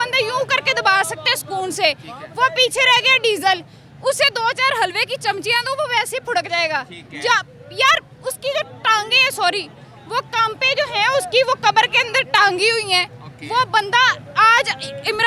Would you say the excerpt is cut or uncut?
uncut